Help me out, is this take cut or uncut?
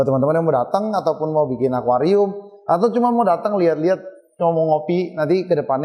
uncut